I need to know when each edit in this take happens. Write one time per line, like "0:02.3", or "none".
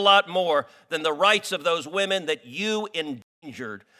none

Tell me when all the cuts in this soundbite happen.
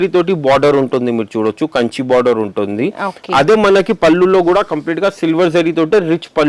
none

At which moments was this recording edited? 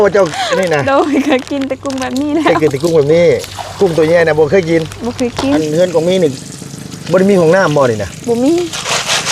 0:05.6

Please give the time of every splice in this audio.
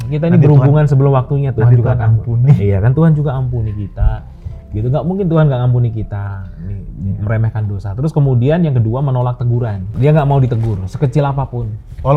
0:09.8

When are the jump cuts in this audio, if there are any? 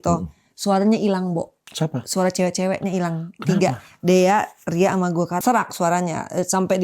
0:05.3

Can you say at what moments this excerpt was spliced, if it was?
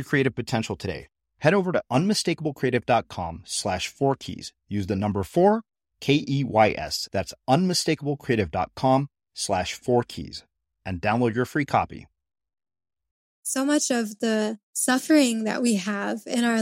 0:13.5
0:14.7

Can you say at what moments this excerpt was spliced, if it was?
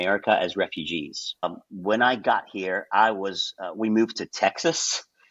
0:01.4

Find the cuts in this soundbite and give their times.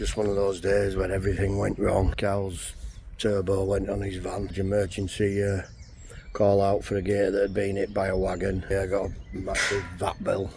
0:02.1
0:04.5
0:08.7

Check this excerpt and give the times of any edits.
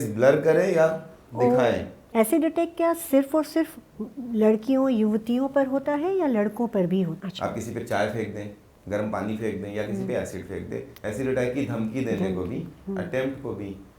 0:02.0
0:07.2
0:10.9

